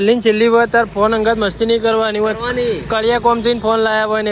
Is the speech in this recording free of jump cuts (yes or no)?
yes